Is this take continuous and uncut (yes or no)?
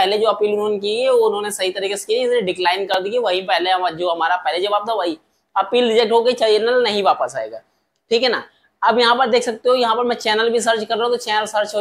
yes